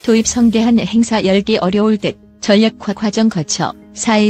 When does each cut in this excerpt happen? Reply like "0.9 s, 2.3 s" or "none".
none